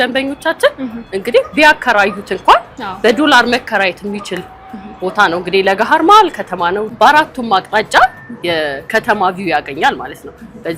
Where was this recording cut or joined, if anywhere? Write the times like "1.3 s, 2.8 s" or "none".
6.9 s